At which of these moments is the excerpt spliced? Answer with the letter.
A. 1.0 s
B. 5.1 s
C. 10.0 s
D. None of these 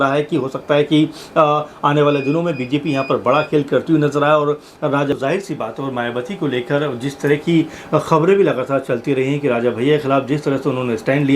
B